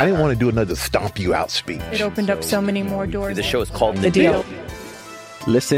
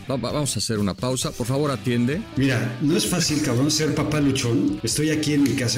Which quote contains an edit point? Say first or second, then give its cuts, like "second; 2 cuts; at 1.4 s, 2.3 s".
second; 2 cuts; at 2.3 s, 4.8 s